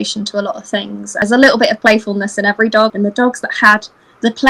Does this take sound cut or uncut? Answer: cut